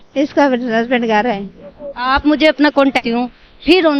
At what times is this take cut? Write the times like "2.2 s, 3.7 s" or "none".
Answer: 3.0 s

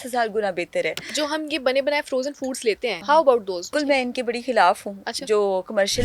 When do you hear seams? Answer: 3.0 s, 3.7 s

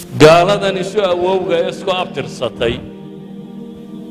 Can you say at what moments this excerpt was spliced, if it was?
none

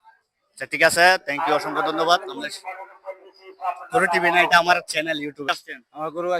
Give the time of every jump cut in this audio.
5.5 s

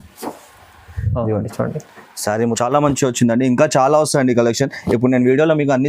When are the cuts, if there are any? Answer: 2.6 s

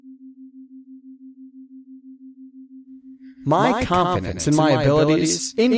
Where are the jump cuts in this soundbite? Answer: 3.4 s

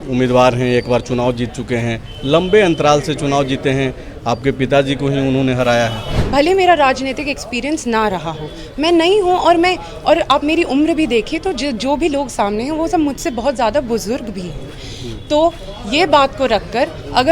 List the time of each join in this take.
6.1 s

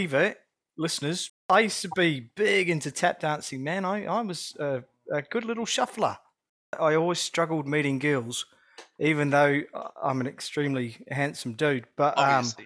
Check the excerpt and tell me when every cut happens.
1.4 s, 6.8 s

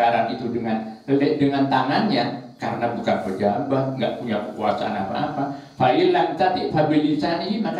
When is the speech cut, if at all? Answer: none

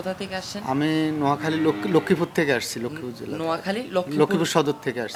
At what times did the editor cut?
none

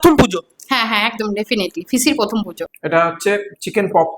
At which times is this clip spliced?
2.6 s

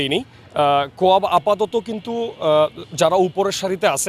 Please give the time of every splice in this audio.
none

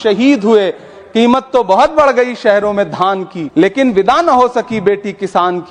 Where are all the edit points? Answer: 3.4 s

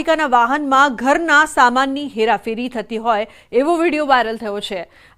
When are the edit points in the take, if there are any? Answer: none

